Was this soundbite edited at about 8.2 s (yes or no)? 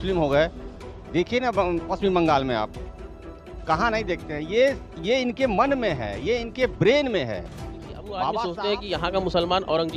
yes